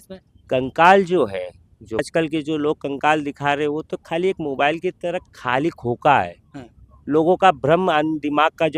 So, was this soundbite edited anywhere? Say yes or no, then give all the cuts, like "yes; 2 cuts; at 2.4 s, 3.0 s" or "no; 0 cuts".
yes; 1 cut; at 2.0 s